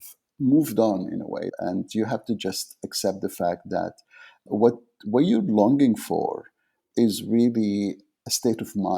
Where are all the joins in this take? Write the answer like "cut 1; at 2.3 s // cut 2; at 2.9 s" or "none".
cut 1; at 1.5 s // cut 2; at 4.4 s // cut 3; at 6.8 s // cut 4; at 8.2 s